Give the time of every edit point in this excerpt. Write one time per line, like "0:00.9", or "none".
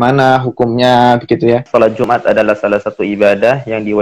0:02.0

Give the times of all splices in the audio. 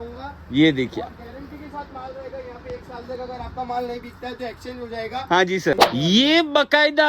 0:05.8

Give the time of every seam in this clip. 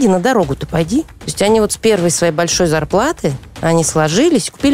0:01.2

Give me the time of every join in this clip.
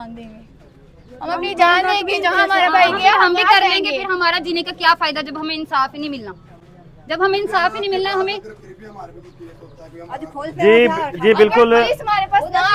none

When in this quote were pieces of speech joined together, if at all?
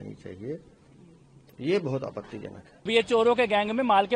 0:02.9

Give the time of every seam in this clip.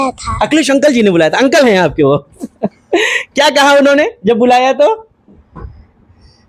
none

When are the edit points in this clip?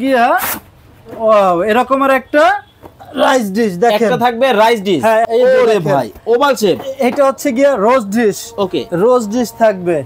0:05.3

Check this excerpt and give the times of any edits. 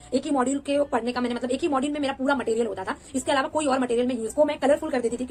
none

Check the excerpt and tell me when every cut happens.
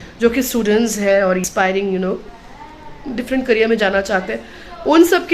0:01.4

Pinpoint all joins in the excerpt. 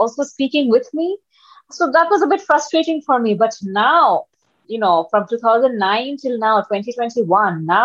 0:04.5

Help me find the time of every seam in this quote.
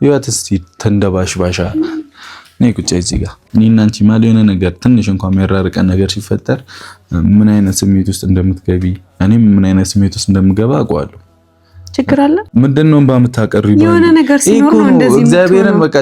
0:03.4
0:12.5

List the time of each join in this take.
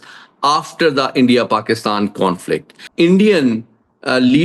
0:02.8

